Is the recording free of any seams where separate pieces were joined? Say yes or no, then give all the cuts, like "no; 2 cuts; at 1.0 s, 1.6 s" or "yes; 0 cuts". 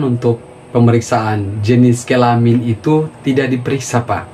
yes; 0 cuts